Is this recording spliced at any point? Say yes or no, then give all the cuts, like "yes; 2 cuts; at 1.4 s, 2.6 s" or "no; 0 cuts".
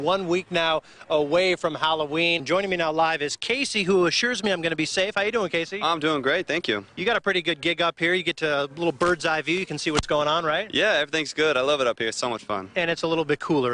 yes; 1 cut; at 2.4 s